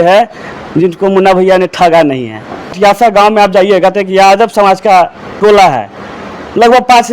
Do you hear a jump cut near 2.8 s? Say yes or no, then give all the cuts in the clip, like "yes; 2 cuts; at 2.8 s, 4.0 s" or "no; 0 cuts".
yes; 1 cut; at 2.8 s